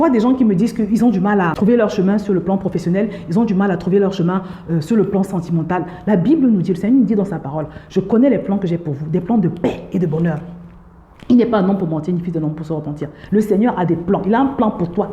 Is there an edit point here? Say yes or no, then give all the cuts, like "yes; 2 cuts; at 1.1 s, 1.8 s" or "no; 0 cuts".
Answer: yes; 1 cut; at 1.5 s